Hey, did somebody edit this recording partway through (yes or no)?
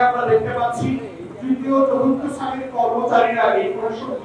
no